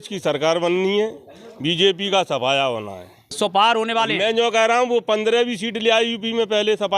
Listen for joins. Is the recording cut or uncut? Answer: cut